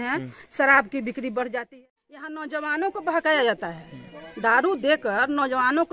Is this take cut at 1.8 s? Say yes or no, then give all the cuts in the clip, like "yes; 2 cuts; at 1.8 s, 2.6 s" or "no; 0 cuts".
yes; 1 cut; at 1.8 s